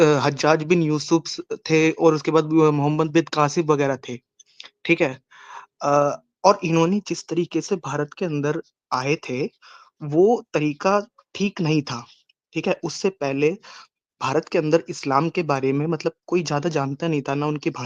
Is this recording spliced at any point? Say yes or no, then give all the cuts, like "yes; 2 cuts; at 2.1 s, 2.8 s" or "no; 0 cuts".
no; 0 cuts